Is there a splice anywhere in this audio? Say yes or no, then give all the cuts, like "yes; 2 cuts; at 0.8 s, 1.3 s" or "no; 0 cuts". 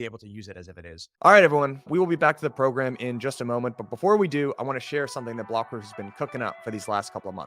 yes; 1 cut; at 1.1 s